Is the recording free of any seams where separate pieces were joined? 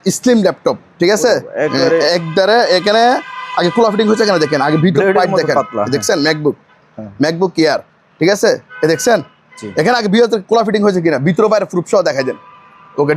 yes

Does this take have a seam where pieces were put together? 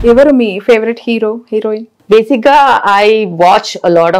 no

